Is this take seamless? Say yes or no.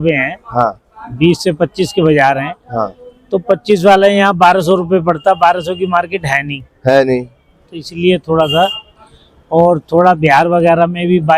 yes